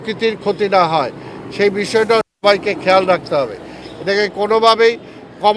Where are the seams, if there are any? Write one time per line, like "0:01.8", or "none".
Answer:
none